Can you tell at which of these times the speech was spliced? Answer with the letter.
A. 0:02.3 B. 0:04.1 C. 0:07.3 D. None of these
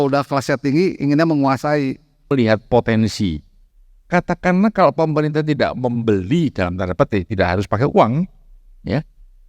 A